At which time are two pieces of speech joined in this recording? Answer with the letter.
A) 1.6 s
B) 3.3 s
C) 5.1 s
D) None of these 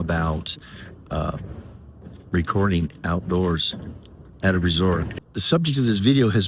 C